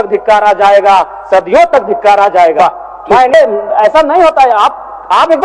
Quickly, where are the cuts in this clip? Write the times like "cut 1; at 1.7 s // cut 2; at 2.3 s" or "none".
cut 1; at 3.3 s